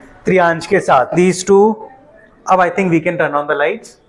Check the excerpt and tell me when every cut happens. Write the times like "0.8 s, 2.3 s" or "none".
1.1 s